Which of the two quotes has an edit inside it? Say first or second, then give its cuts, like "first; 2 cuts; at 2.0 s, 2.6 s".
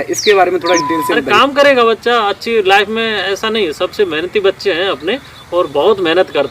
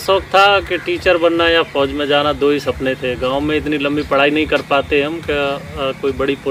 first; 1 cut; at 1.2 s